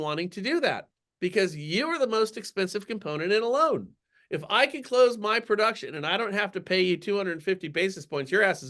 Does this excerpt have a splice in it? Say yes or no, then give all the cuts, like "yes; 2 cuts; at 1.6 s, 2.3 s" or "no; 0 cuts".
no; 0 cuts